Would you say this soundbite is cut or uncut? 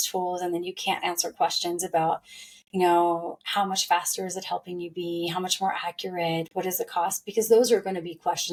uncut